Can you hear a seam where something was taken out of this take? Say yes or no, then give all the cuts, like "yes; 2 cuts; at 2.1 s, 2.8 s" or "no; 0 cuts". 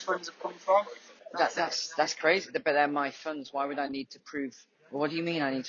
yes; 1 cut; at 1.1 s